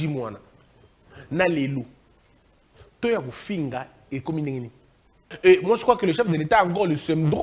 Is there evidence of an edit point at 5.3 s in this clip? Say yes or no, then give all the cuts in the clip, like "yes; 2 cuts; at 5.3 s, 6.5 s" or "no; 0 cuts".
yes; 1 cut; at 5.3 s